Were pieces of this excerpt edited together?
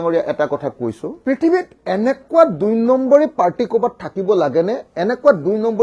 no; 0 cuts

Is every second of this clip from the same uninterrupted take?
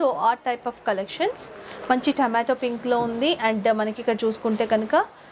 yes; 0 cuts

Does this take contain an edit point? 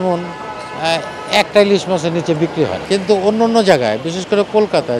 no; 0 cuts

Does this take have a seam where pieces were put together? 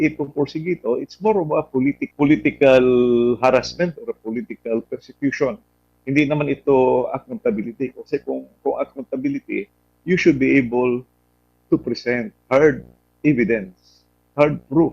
yes; 1 cut; at 2.0 s

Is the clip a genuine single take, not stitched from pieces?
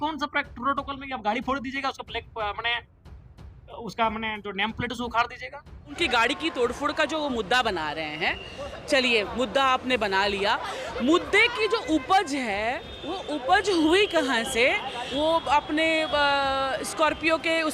no; 2 cuts; at 6.0 s, 15.0 s

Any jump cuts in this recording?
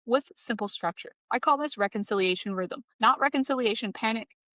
yes; 2 cuts; at 1.1 s, 2.8 s

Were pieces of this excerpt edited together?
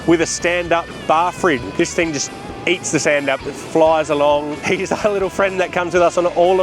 yes; 2 cuts; at 1.6 s, 4.5 s

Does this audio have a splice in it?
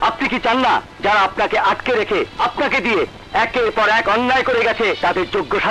yes; 3 cuts; at 0.9 s, 2.3 s, 5.0 s

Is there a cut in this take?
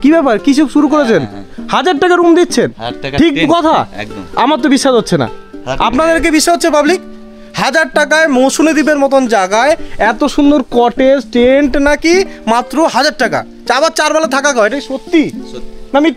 no; 0 cuts

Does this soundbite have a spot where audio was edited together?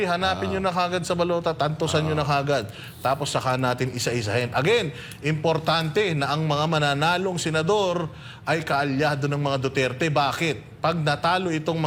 no; 0 cuts

